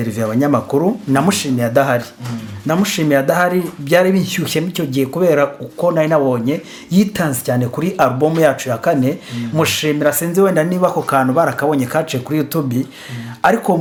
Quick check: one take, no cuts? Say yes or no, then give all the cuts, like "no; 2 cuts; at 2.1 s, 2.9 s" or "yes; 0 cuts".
yes; 0 cuts